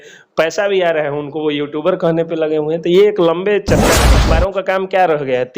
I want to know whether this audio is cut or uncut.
cut